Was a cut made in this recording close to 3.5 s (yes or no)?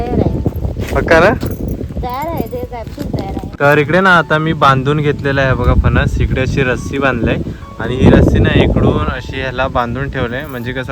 yes